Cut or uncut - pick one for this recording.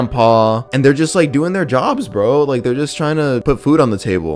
uncut